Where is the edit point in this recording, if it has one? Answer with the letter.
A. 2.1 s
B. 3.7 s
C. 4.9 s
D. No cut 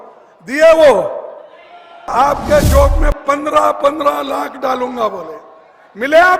A